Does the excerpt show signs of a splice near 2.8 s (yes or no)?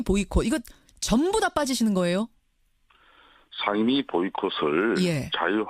yes